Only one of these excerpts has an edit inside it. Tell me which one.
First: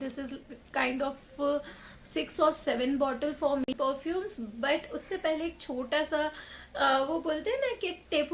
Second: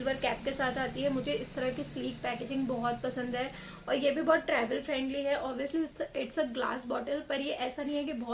first; 1 cut; at 3.6 s

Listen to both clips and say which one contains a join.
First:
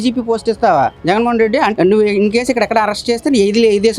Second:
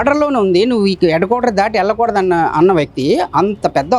first; 1 cut; at 1.7 s

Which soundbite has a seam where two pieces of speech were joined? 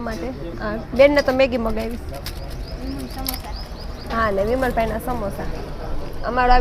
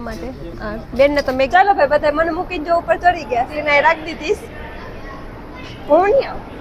second; 2 cuts; at 1.5 s, 3.5 s

